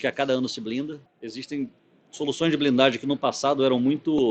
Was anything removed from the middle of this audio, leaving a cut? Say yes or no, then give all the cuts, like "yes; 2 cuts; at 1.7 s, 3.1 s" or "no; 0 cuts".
yes; 1 cut; at 1.1 s